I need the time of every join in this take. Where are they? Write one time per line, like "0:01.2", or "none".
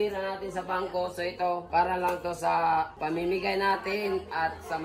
0:01.6
0:03.0